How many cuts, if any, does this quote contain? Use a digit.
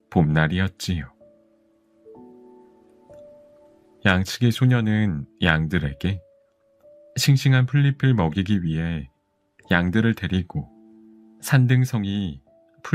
2